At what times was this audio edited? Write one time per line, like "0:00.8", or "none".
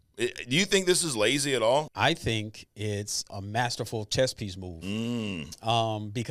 0:01.9
0:03.3